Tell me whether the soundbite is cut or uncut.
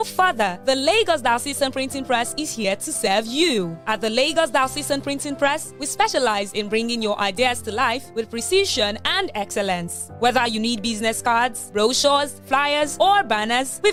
uncut